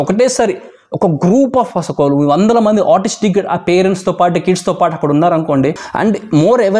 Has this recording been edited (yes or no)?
yes